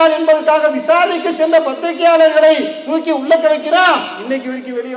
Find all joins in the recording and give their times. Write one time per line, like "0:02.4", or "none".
none